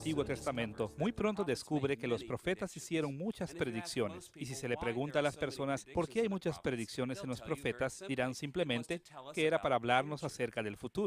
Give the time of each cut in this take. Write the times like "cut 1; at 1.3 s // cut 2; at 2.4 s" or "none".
none